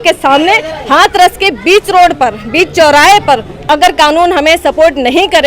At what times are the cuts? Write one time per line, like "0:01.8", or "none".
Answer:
0:03.5